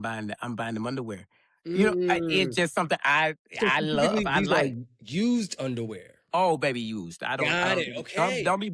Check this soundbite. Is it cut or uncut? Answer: uncut